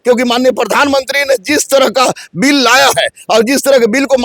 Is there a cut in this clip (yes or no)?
no